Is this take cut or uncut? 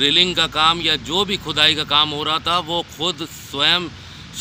uncut